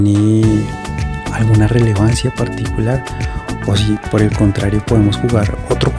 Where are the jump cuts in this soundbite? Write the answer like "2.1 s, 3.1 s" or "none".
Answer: none